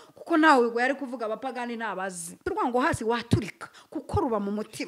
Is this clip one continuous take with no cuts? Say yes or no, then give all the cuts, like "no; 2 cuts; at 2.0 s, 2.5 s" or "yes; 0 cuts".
no; 1 cut; at 2.4 s